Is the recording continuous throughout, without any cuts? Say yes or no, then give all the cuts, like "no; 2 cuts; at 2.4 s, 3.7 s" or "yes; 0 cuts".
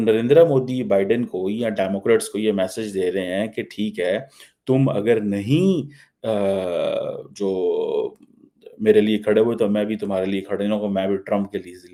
yes; 0 cuts